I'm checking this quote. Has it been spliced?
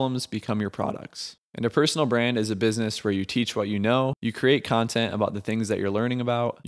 yes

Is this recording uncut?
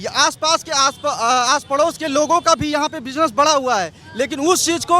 yes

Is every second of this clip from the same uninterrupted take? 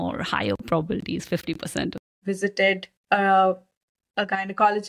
no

